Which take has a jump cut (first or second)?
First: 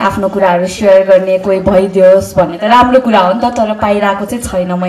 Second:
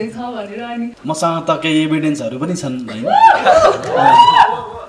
second